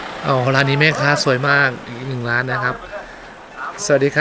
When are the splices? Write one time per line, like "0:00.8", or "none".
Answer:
none